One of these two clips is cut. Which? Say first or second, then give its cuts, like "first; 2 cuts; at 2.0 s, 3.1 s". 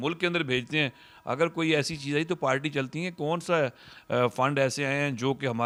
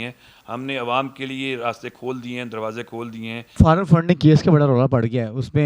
second; 1 cut; at 3.5 s